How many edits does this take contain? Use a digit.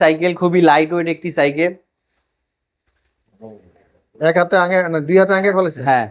0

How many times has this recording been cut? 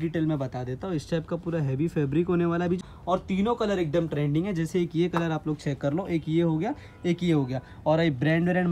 1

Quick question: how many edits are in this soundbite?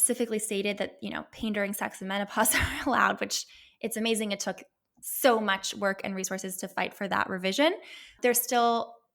1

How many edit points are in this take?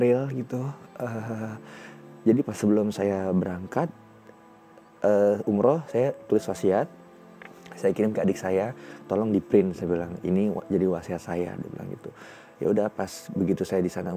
0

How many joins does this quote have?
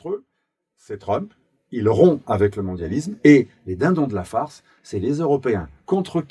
0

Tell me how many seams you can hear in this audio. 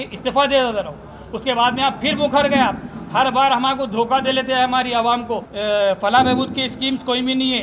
1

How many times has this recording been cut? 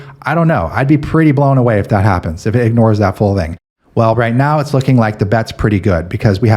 1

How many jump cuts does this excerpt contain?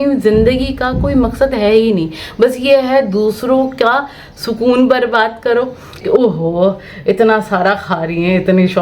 1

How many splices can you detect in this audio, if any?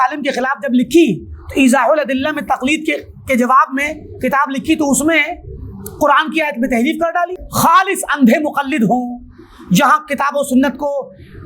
1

